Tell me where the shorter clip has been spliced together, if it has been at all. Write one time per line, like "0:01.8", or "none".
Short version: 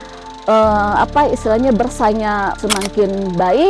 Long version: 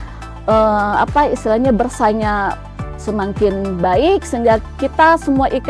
0:02.6

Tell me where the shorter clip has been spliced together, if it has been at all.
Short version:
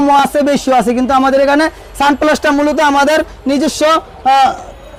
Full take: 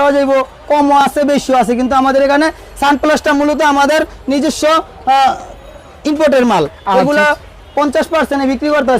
none

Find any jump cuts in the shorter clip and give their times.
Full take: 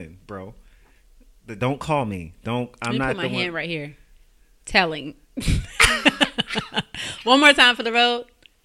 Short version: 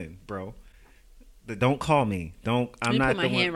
none

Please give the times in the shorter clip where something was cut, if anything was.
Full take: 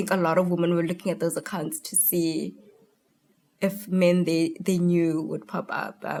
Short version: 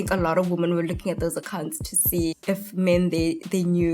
0:02.3

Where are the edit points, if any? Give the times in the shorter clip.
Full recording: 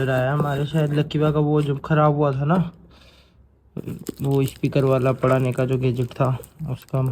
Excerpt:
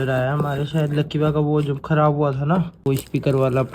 0:02.8

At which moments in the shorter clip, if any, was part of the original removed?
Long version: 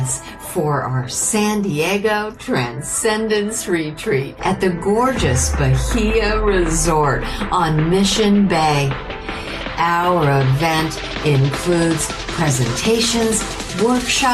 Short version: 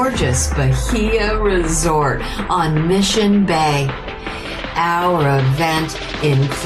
none

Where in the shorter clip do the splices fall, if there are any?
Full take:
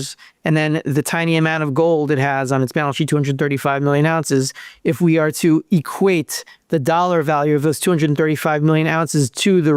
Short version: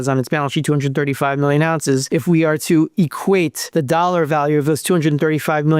0:02.0
0:03.6

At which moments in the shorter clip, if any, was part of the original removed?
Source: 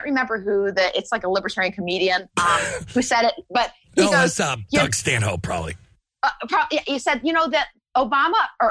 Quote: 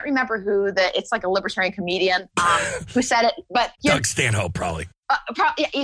0:03.7
0:04.9

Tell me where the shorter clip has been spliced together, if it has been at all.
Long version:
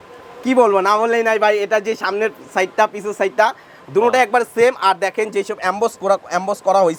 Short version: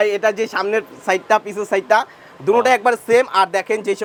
none

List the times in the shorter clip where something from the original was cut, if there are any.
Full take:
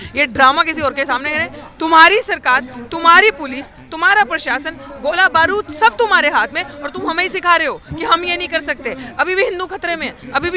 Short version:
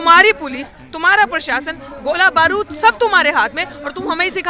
none

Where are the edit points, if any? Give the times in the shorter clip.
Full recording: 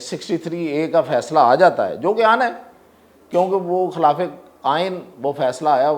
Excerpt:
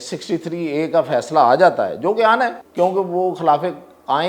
0:02.6

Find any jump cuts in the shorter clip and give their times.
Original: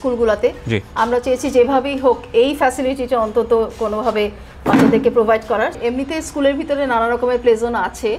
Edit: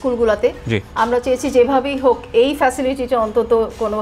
none

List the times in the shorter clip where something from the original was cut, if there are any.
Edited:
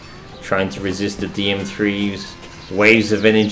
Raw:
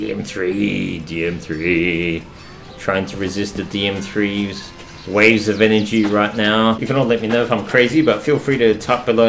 none

